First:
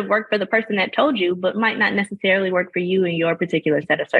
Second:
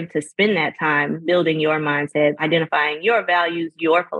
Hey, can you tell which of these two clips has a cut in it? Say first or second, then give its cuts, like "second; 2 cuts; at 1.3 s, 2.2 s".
second; 2 cuts; at 1.2 s, 2.4 s